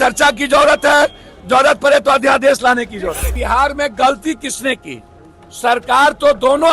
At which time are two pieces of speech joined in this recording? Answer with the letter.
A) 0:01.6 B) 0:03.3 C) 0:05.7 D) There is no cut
B